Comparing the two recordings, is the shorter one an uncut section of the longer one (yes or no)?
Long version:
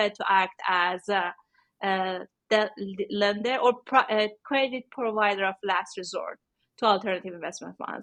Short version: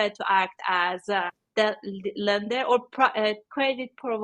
no